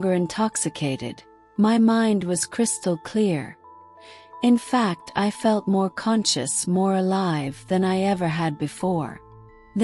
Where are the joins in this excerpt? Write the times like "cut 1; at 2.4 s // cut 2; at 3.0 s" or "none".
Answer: none